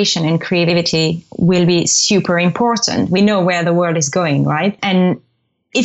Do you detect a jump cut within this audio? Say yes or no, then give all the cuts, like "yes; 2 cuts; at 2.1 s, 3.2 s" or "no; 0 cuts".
yes; 3 cuts; at 0.7 s, 3.2 s, 4.8 s